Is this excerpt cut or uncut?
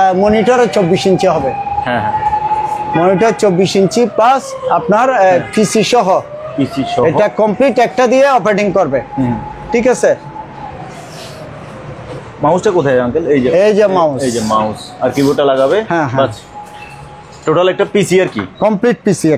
uncut